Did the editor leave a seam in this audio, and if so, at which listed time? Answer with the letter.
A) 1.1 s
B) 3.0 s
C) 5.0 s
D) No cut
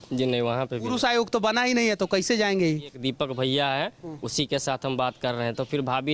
B